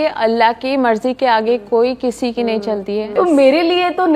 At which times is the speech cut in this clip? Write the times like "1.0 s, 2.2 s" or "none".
3.1 s